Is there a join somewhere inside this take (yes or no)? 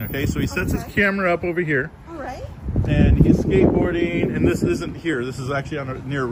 no